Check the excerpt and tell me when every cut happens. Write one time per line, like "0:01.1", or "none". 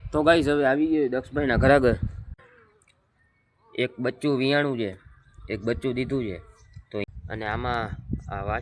0:02.4
0:07.0

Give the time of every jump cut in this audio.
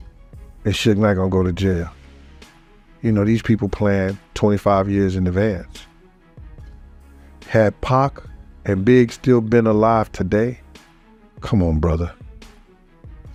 none

